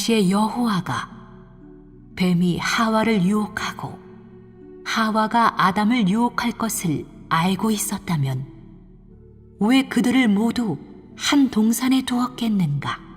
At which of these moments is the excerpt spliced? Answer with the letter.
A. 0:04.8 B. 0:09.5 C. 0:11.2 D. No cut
B